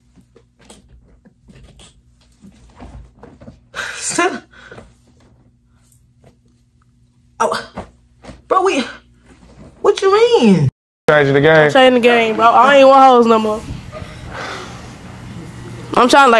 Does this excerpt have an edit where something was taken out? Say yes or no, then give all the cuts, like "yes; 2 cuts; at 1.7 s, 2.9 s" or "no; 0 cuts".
yes; 1 cut; at 10.8 s